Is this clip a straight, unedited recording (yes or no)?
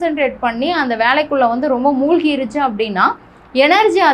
yes